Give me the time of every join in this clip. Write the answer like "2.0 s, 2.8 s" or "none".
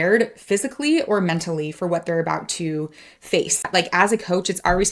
3.7 s

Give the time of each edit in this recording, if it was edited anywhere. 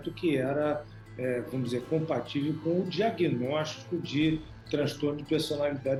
none

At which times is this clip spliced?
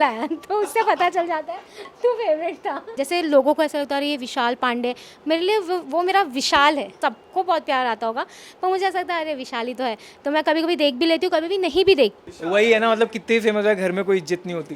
2.9 s, 6.9 s, 12.3 s

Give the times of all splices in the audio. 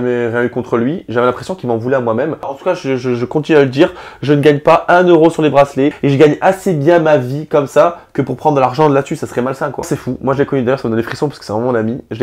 2.5 s, 6.0 s, 9.9 s

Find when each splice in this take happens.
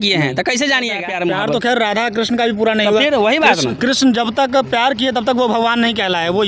1.1 s

